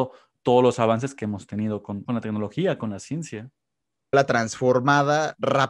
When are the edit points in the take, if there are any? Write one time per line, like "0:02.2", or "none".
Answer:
0:02.0
0:04.1